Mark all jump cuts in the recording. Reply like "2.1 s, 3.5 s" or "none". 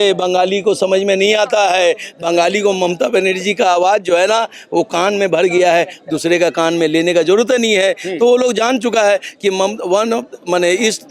none